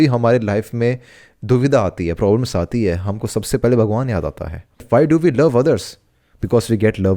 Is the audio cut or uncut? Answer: cut